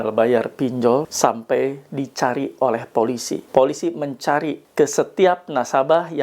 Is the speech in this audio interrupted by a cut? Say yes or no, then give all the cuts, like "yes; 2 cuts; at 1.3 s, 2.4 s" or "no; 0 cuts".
yes; 3 cuts; at 1.1 s, 3.3 s, 4.6 s